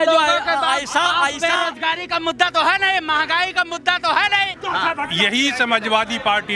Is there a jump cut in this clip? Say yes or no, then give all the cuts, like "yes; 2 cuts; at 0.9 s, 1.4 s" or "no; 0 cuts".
yes; 1 cut; at 4.5 s